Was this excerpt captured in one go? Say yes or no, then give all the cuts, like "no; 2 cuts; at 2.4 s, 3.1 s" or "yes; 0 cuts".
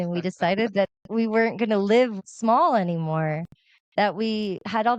no; 1 cut; at 2.3 s